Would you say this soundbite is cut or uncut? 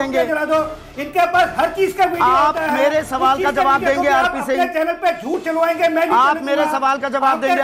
uncut